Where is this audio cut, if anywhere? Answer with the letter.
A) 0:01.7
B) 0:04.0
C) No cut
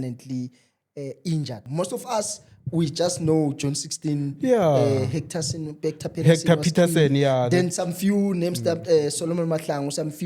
A